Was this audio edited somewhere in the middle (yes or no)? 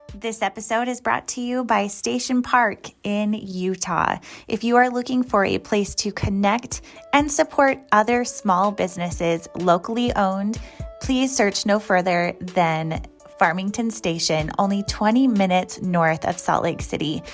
no